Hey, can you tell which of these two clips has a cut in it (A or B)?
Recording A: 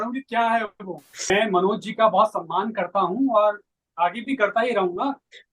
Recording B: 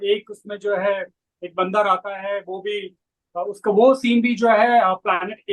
A